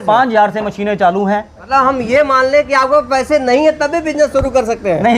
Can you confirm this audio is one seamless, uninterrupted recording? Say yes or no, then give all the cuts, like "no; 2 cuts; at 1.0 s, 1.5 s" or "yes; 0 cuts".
no; 1 cut; at 1.5 s